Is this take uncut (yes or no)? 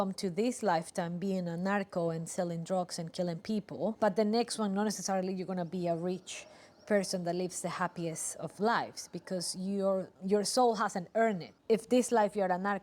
no